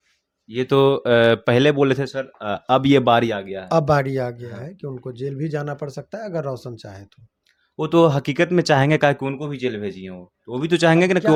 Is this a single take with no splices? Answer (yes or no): yes